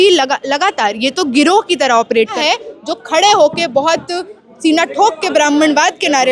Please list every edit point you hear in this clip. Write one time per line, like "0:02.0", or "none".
0:02.3